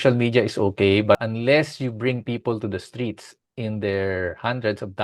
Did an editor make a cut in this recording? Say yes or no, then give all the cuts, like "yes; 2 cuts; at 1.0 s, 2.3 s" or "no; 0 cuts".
yes; 1 cut; at 1.2 s